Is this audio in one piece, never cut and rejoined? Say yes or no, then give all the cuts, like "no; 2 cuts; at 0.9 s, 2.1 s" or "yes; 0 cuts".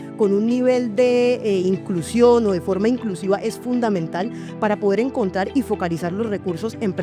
yes; 0 cuts